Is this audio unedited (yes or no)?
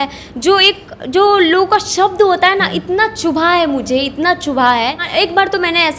no